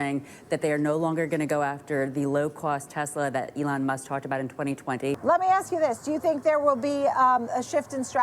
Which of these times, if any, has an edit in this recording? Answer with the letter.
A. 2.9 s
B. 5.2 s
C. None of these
B